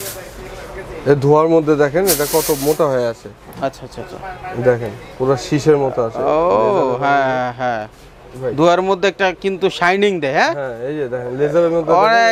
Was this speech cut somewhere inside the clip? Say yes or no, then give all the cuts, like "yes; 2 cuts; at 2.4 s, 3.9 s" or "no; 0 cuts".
no; 0 cuts